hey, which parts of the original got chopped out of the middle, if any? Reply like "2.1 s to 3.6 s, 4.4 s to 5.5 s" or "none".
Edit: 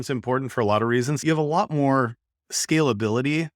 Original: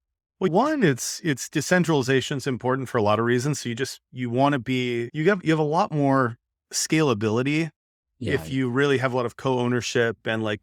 3.6 s to 5.4 s